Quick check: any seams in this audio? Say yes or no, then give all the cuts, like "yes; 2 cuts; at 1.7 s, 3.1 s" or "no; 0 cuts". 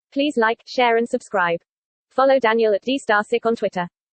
no; 0 cuts